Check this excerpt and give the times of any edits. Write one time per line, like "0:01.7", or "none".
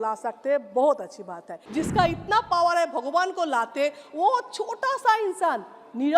0:01.5